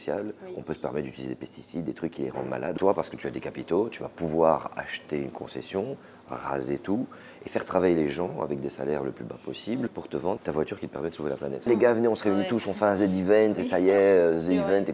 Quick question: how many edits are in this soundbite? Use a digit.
3